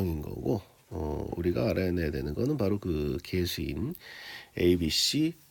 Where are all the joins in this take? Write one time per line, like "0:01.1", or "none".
none